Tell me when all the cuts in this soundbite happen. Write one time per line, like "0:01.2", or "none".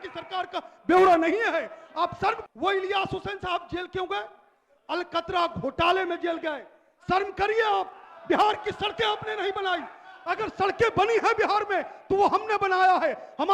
0:02.4